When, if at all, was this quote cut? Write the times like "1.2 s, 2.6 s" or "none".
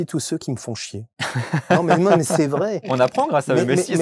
2.9 s